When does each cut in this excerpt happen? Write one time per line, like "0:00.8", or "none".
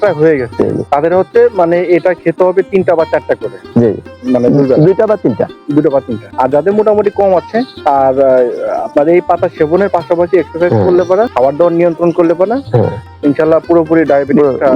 0:00.8
0:06.2
0:07.7
0:11.3